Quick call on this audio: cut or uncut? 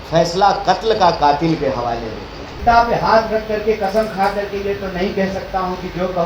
cut